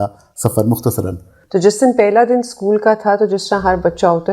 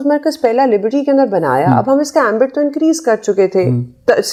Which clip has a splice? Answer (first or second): first